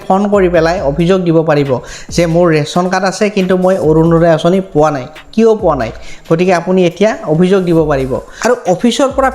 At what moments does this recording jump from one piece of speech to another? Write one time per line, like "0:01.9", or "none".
0:08.3